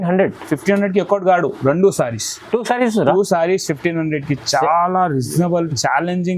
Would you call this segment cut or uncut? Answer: uncut